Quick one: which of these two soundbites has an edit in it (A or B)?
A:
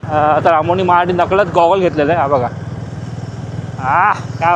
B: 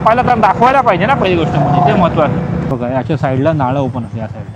B